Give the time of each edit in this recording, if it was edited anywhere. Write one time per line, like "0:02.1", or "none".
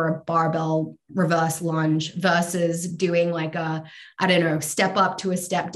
none